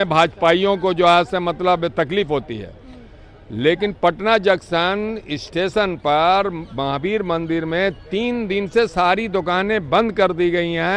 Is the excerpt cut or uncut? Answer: uncut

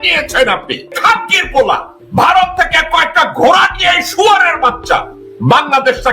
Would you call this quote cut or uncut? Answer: cut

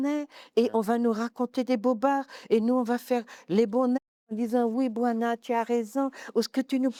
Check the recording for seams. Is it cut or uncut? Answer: uncut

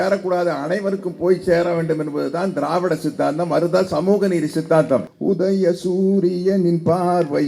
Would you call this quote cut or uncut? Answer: cut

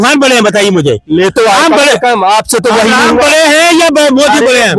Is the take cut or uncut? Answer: uncut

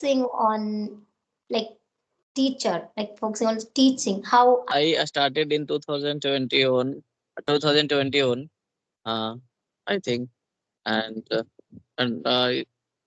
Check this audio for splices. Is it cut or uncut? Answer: cut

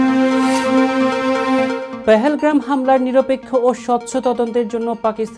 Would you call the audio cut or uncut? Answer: uncut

